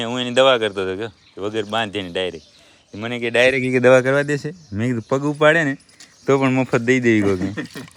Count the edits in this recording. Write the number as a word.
zero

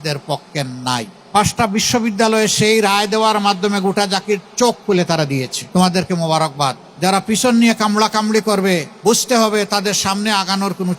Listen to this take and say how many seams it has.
four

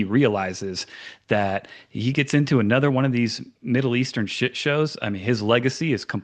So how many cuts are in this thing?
zero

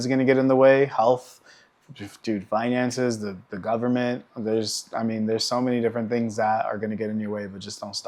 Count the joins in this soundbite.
zero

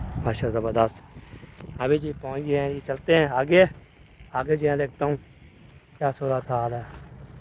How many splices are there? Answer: zero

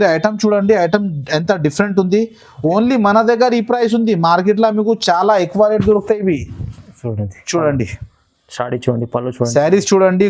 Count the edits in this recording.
zero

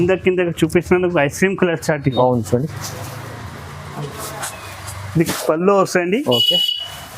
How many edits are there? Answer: one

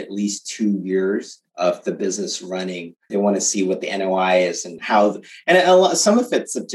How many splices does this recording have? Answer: three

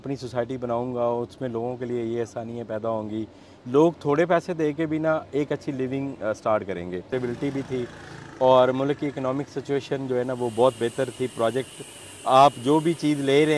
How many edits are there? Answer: one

